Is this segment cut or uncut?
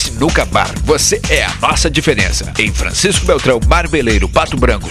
uncut